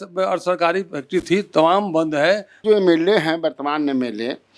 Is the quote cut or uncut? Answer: cut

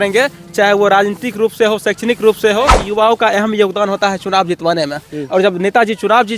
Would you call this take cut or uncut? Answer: cut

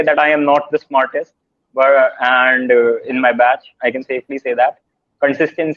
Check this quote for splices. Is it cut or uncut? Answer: uncut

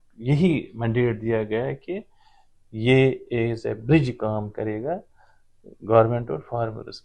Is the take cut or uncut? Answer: uncut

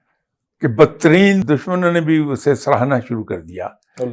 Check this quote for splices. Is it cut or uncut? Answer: cut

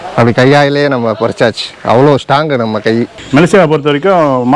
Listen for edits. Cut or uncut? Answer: cut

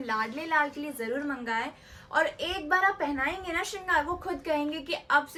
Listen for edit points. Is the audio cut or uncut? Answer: uncut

